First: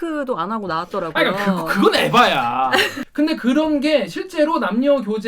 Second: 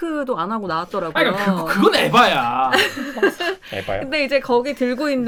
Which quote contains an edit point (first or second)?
first